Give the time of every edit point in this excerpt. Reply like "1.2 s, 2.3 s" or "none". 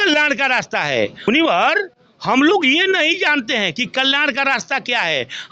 1.3 s